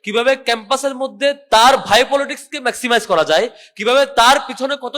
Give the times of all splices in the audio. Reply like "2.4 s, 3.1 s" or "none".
none